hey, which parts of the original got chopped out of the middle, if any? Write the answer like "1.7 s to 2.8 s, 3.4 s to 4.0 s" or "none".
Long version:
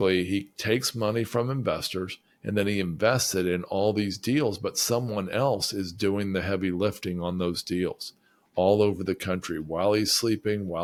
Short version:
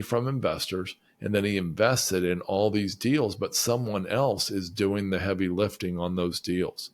none